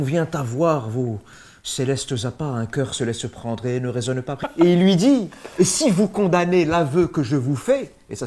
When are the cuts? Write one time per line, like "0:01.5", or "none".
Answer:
0:04.4